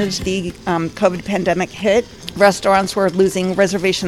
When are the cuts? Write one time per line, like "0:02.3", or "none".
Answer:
0:02.2